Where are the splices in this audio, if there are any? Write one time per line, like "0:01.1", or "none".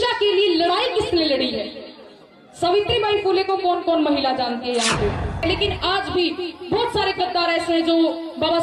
0:05.4